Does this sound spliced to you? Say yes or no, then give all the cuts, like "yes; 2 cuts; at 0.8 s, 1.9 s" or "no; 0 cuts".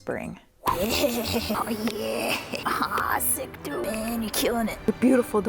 yes; 2 cuts; at 1.6 s, 2.6 s